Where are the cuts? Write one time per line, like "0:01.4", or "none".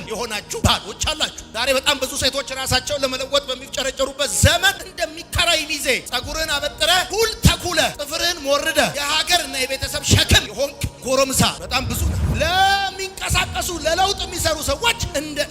0:12.1